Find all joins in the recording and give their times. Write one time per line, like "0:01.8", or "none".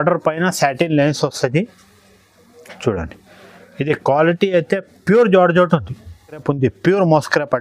0:06.4